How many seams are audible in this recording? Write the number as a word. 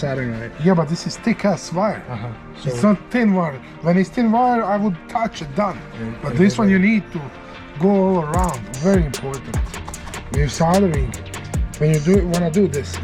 one